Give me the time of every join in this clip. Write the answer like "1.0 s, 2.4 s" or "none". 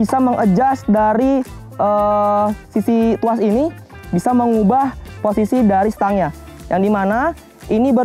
none